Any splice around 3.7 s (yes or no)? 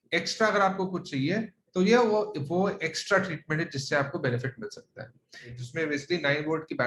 no